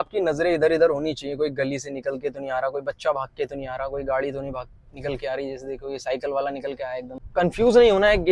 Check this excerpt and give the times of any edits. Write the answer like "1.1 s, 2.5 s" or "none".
7.2 s